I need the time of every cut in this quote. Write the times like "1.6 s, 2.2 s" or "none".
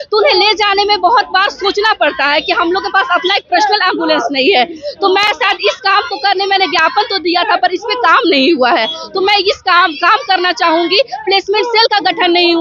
none